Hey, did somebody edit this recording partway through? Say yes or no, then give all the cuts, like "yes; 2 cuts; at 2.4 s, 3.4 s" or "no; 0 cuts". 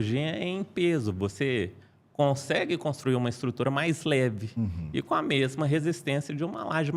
no; 0 cuts